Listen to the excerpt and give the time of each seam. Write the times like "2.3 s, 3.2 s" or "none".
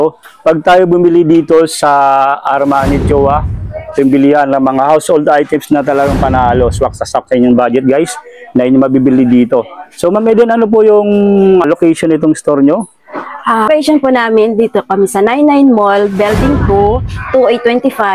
11.6 s, 13.7 s